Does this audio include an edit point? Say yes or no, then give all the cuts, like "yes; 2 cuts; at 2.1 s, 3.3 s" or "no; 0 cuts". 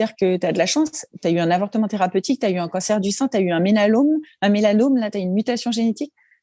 no; 0 cuts